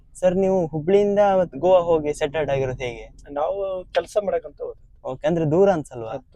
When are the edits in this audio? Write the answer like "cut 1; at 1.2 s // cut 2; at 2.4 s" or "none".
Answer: none